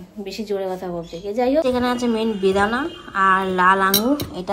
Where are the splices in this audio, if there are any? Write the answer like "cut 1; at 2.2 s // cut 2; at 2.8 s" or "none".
cut 1; at 1.6 s